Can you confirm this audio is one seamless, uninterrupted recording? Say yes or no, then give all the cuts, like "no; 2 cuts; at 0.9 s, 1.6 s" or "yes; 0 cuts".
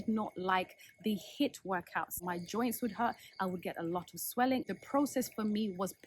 no; 2 cuts; at 2.2 s, 4.6 s